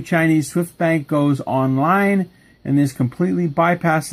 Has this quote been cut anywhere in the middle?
no; 0 cuts

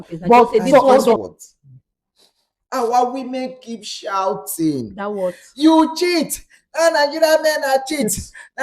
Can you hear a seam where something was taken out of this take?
yes; 1 cut; at 1.2 s

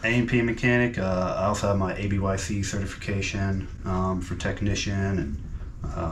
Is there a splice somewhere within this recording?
no; 0 cuts

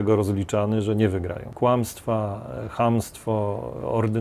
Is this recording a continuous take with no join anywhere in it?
no; 1 cut; at 1.4 s

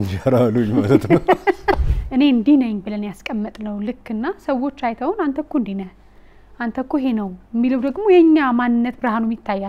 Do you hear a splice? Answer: yes; 1 cut; at 1.8 s

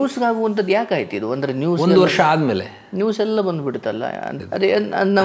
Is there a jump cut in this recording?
yes; 1 cut; at 4.3 s

